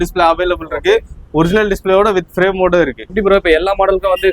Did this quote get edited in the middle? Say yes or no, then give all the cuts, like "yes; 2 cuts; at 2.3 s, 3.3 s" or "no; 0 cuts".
yes; 1 cut; at 3.1 s